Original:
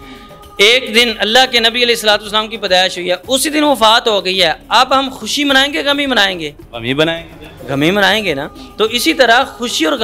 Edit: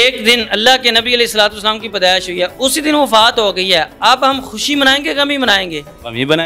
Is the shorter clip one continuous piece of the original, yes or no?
yes